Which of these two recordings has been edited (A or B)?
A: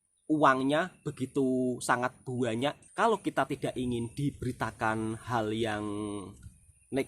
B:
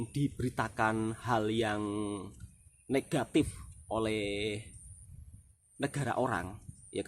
A